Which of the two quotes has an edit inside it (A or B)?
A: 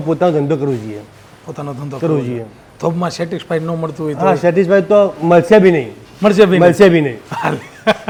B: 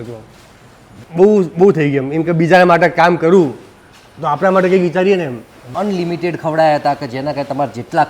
B